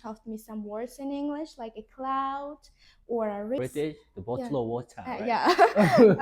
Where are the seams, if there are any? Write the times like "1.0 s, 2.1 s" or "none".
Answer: 3.6 s